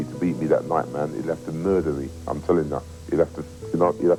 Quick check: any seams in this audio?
no; 0 cuts

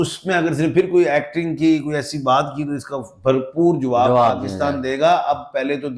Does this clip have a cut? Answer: no; 0 cuts

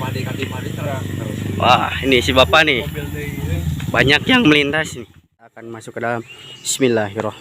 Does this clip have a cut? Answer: yes; 1 cut; at 4.9 s

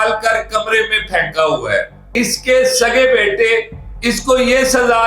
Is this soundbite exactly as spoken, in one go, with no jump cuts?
no; 1 cut; at 2.0 s

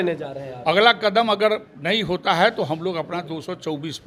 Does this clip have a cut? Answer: no; 0 cuts

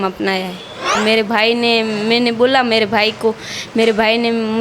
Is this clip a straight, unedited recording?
no; 1 cut; at 0.9 s

